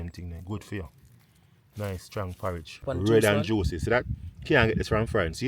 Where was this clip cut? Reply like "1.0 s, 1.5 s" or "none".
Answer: 2.8 s